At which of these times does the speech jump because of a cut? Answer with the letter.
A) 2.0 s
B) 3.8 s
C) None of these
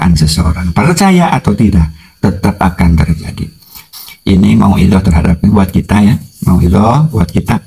B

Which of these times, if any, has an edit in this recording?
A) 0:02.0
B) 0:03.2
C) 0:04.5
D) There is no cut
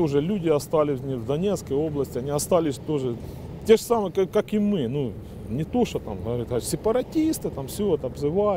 B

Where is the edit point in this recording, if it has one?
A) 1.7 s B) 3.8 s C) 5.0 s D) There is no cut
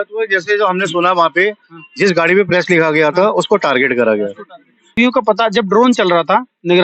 C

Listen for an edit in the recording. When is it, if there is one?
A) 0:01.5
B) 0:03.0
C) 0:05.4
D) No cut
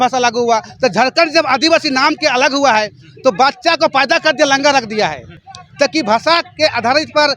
D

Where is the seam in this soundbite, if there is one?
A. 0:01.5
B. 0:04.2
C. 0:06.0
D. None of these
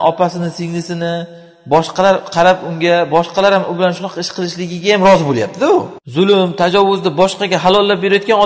C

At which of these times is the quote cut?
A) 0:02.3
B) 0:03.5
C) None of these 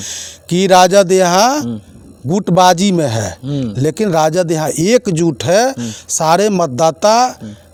C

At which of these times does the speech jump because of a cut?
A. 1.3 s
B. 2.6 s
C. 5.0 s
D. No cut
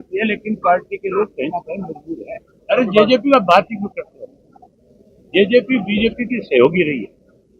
B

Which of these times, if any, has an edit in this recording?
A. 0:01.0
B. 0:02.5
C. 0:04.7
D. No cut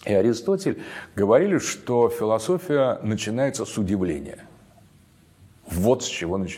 D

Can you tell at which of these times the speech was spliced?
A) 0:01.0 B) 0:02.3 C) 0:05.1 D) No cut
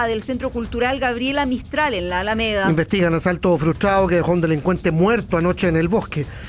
D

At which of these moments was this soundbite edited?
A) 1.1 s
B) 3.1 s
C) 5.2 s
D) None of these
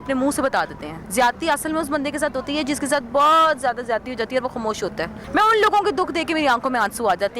C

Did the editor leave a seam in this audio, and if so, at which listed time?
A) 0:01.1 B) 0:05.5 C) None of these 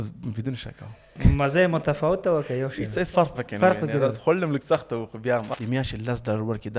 B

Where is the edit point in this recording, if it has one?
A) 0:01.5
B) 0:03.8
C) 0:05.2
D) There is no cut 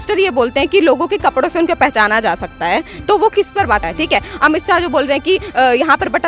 D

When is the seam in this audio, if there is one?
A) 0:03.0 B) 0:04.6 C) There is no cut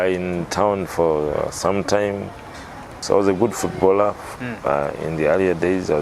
A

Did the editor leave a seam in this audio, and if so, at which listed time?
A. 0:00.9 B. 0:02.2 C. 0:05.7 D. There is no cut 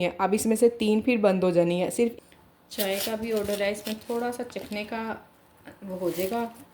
B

